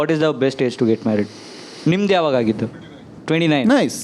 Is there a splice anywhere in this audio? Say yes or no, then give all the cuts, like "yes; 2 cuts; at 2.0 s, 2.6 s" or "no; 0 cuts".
no; 0 cuts